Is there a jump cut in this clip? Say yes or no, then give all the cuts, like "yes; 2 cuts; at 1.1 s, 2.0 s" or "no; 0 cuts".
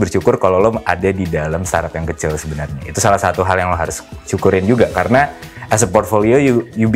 no; 0 cuts